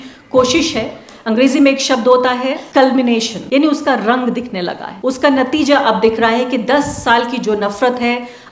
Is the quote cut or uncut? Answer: cut